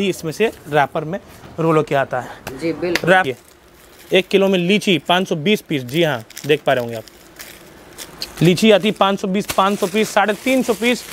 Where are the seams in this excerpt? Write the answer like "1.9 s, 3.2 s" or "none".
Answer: 3.2 s